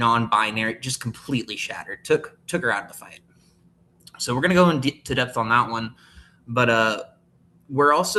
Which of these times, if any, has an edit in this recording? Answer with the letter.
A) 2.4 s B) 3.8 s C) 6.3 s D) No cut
D